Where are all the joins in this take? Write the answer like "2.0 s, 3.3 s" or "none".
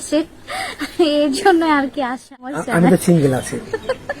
2.6 s